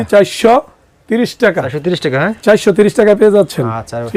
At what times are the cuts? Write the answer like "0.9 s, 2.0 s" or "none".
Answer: none